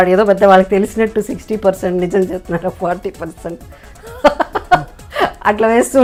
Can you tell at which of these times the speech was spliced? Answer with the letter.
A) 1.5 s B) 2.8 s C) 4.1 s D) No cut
D